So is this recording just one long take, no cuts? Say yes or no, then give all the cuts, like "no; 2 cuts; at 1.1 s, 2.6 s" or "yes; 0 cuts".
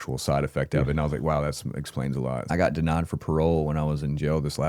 no; 1 cut; at 2.5 s